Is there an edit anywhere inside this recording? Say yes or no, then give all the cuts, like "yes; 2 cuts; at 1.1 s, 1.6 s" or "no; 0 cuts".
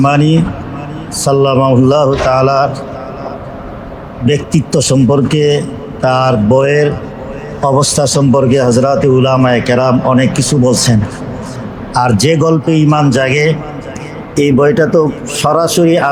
no; 0 cuts